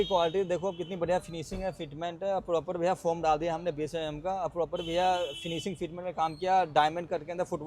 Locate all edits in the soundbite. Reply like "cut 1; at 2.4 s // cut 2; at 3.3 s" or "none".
none